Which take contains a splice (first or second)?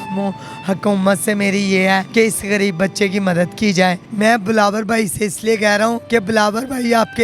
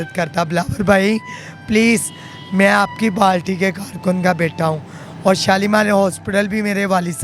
first